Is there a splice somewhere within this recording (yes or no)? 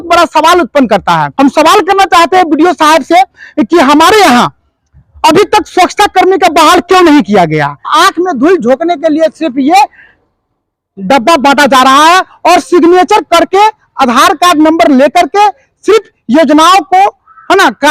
yes